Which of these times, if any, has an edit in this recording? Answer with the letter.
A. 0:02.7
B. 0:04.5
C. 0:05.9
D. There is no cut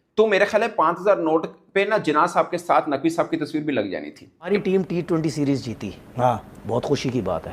B